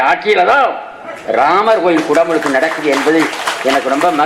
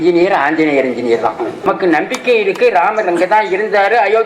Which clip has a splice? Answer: second; 1 cut; at 1.7 s

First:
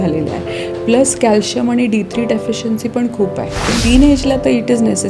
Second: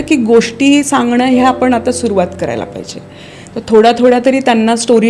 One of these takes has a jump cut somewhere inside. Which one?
first; 1 cut; at 3.7 s

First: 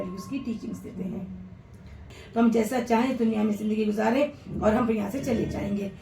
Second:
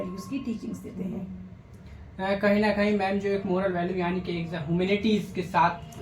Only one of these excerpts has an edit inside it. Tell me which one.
first; 1 cut; at 2.1 s

